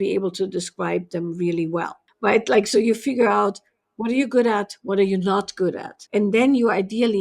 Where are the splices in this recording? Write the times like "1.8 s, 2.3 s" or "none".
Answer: 2.0 s, 5.9 s